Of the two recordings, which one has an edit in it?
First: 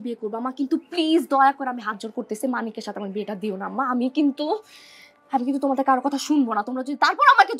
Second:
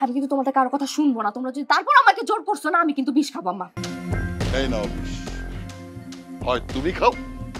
second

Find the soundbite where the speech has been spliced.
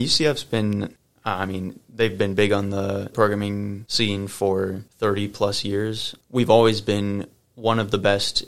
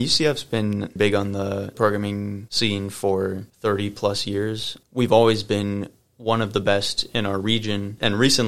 second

